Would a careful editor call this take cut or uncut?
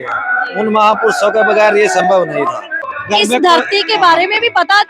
cut